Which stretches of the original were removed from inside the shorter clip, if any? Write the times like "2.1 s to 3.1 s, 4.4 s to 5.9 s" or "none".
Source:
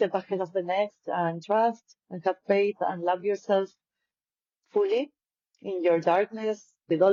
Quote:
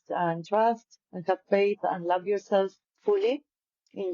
3.8 s to 4.5 s